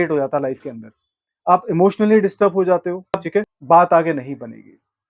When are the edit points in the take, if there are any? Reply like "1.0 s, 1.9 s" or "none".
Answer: 3.5 s